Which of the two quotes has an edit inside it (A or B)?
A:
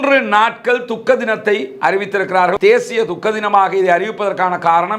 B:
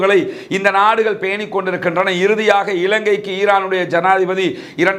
A